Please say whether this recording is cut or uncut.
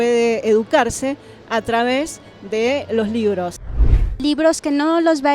cut